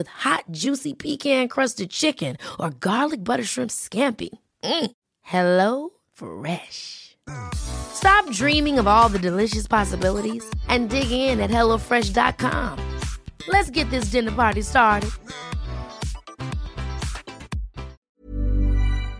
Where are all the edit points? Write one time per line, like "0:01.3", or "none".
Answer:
0:18.1